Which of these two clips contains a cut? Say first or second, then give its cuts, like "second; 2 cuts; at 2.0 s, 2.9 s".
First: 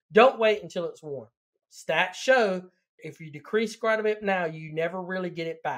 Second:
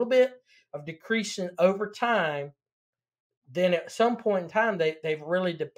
first; 1 cut; at 3.0 s